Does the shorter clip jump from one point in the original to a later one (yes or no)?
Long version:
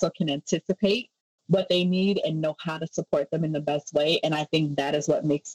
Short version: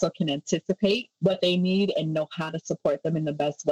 yes